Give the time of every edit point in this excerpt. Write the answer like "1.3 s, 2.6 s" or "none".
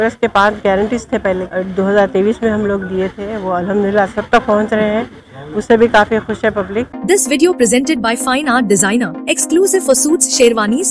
1.5 s, 6.9 s